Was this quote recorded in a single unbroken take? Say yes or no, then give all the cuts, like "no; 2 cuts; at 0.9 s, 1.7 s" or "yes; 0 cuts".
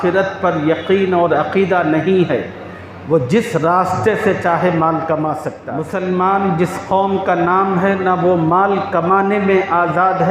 no; 1 cut; at 5.6 s